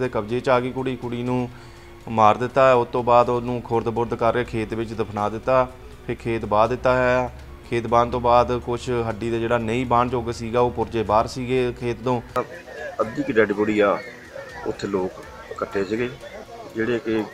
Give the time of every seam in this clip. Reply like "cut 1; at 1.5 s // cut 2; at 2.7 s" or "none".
cut 1; at 12.4 s